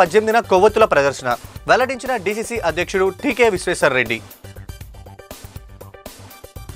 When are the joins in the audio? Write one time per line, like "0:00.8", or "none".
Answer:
none